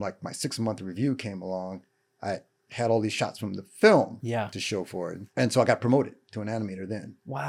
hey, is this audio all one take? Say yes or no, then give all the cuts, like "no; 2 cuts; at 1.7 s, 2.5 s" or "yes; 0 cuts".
yes; 0 cuts